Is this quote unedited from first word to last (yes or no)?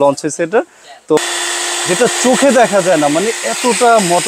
no